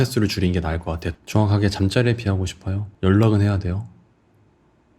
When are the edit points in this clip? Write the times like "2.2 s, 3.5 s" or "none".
1.0 s